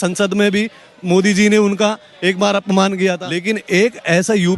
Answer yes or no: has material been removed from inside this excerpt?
yes